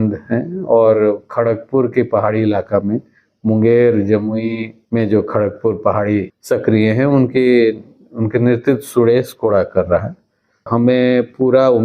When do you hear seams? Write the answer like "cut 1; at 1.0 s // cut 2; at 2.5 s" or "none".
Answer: cut 1; at 4.7 s // cut 2; at 6.3 s // cut 3; at 10.7 s